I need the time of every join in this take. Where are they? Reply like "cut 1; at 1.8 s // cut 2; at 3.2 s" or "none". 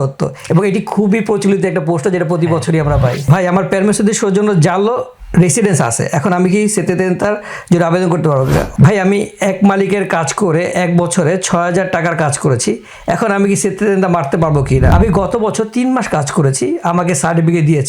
cut 1; at 3.3 s // cut 2; at 8.7 s // cut 3; at 14.9 s